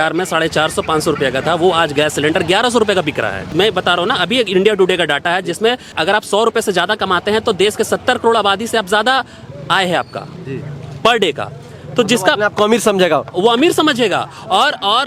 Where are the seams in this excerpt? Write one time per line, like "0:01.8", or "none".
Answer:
0:03.5
0:05.9